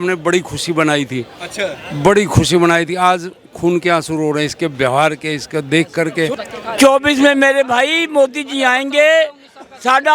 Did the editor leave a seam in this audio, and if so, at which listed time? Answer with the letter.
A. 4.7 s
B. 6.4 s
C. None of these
B